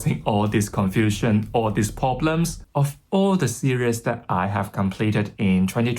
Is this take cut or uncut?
cut